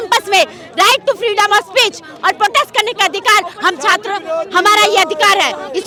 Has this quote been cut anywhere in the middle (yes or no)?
no